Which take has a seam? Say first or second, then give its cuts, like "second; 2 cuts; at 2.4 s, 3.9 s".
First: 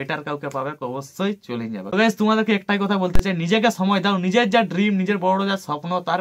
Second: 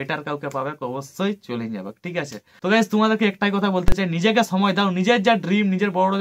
first; 1 cut; at 1.8 s